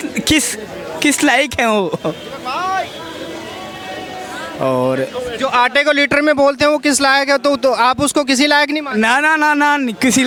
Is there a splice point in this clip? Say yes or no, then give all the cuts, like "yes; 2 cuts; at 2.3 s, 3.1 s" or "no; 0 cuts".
no; 0 cuts